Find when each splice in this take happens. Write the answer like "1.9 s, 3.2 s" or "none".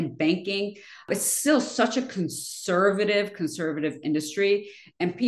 1.1 s